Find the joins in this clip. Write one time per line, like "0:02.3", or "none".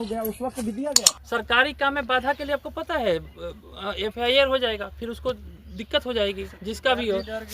0:01.1